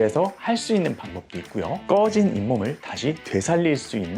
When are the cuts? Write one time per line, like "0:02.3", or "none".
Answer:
0:01.8